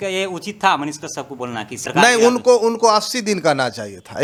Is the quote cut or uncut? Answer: uncut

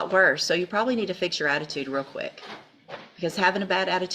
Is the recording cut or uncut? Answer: cut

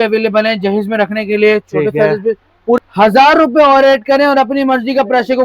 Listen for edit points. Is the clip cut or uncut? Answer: cut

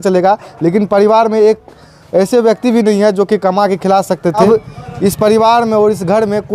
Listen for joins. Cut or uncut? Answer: cut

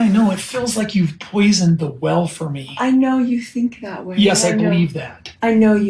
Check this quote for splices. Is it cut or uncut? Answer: uncut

